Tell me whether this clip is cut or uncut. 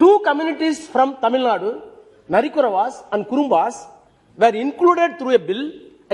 uncut